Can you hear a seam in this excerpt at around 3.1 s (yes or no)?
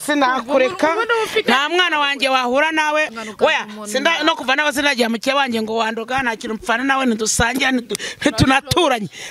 yes